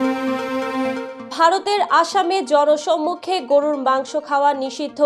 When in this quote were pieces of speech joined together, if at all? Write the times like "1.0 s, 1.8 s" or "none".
1.1 s